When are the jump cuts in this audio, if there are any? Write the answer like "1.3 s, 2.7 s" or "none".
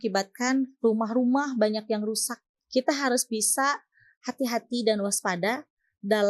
2.5 s